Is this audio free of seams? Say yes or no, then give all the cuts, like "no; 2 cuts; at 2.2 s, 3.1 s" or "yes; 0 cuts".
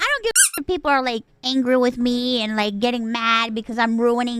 no; 1 cut; at 1.3 s